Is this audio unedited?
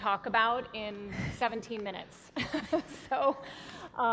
no; 1 cut; at 1.6 s

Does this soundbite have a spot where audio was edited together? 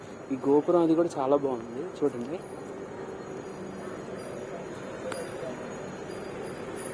no; 0 cuts

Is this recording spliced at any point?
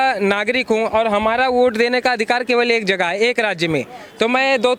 no; 0 cuts

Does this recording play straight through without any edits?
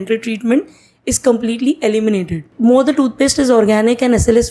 no; 1 cut; at 2.5 s

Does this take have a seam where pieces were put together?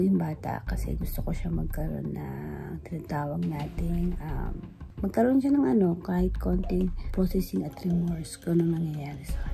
no; 0 cuts

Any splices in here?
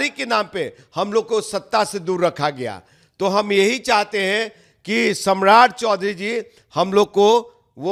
no; 0 cuts

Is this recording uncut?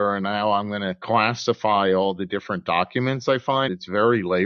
no; 2 cuts; at 1.0 s, 3.7 s

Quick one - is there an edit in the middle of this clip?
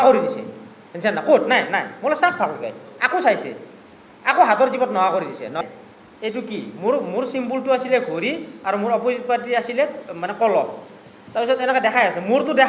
yes; 1 cut; at 5.5 s

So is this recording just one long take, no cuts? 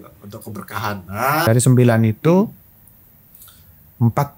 no; 1 cut; at 1.4 s

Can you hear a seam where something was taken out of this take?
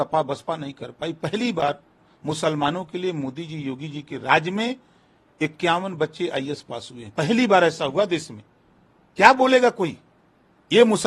no; 0 cuts

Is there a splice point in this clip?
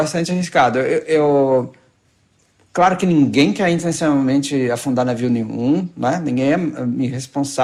no; 0 cuts

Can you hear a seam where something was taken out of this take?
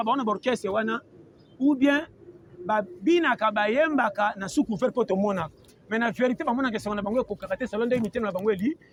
no; 0 cuts

